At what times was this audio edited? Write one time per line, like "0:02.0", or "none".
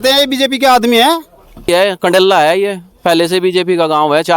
0:01.7